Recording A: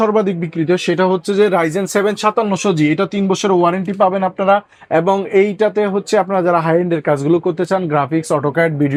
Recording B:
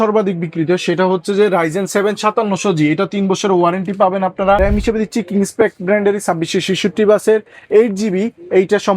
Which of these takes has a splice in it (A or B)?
B